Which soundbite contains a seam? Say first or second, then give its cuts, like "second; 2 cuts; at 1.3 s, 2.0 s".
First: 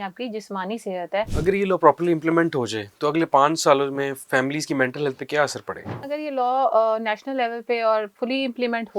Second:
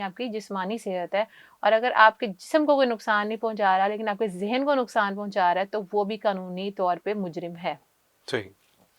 first; 2 cuts; at 1.3 s, 6.0 s